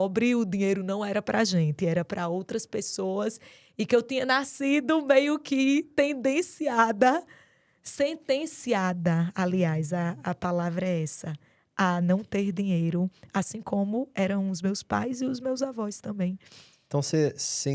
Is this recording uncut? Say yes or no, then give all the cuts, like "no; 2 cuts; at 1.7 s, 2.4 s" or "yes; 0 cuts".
yes; 0 cuts